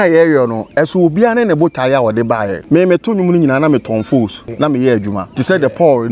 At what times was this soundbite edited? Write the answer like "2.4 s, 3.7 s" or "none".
2.6 s, 4.4 s, 5.3 s